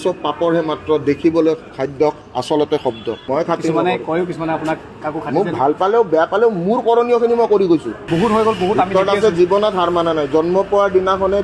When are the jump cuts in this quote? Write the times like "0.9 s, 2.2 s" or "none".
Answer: 3.2 s, 8.0 s